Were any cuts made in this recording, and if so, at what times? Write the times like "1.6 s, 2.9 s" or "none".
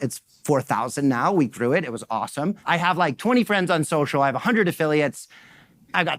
2.6 s